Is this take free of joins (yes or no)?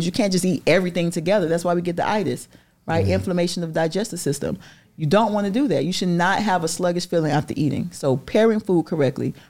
yes